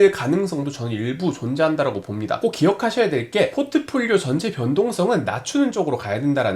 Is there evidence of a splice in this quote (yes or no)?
yes